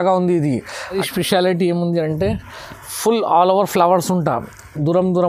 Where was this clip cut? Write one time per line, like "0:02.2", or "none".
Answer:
0:01.0